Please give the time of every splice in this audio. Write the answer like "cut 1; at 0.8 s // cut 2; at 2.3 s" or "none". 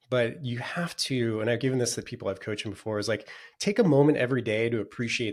none

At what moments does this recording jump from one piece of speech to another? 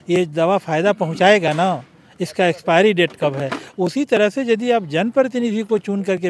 none

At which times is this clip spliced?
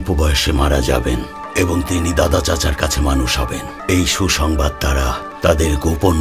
cut 1; at 1.4 s // cut 2; at 3.7 s // cut 3; at 5.3 s

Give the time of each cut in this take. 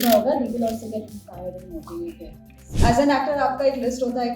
cut 1; at 2.7 s

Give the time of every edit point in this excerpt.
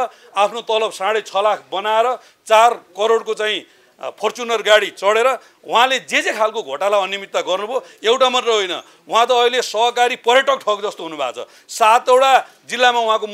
none

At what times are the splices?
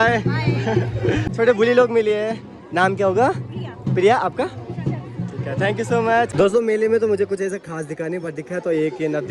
cut 1; at 1.3 s // cut 2; at 6.3 s

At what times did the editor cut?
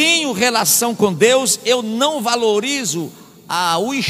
none

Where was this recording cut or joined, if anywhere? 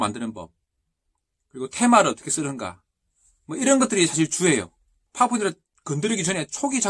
cut 1; at 5.0 s // cut 2; at 5.7 s

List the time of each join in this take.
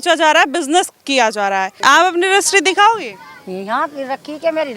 cut 1; at 1.7 s

